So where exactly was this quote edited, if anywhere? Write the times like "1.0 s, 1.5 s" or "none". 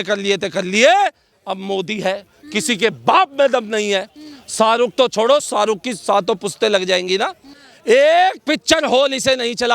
5.5 s